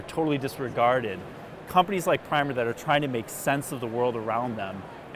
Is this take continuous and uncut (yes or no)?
no